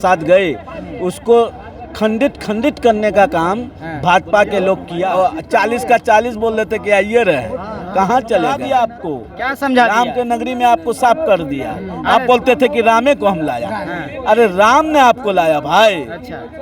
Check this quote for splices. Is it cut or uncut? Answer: cut